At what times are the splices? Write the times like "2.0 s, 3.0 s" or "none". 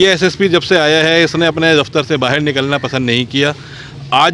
none